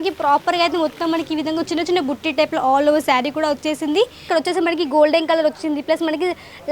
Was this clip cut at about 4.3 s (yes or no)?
yes